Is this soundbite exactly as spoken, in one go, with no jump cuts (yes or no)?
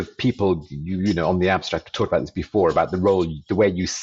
yes